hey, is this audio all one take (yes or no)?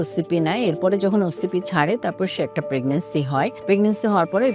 no